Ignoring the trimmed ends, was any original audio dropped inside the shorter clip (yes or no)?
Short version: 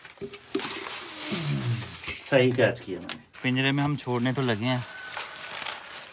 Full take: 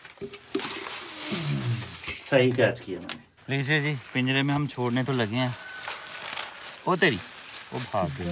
yes